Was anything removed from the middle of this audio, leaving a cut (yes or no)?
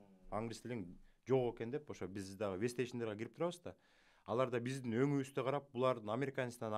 no